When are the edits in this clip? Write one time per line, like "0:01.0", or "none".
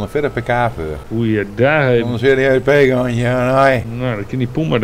0:01.0
0:03.9